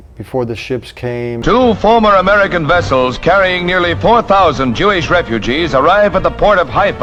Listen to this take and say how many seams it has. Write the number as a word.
zero